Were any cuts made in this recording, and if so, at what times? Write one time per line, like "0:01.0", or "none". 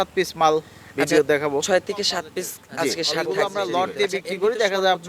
0:03.2